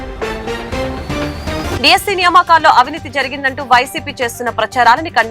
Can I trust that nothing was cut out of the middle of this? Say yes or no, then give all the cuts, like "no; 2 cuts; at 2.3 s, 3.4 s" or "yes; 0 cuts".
no; 1 cut; at 1.7 s